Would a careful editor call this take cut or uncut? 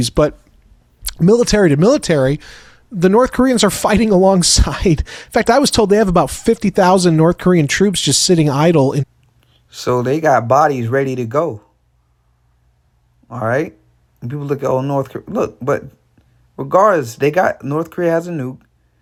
uncut